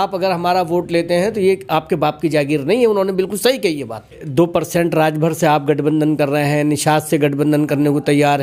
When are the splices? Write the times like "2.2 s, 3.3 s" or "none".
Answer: 4.2 s